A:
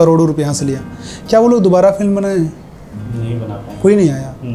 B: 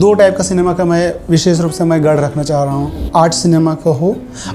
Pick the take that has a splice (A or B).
B